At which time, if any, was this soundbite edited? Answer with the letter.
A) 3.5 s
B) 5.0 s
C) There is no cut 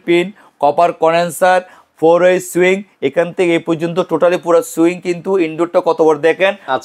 C